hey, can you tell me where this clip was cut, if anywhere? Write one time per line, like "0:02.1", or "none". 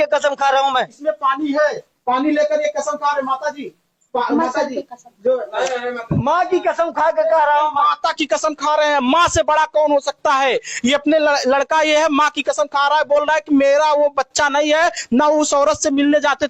none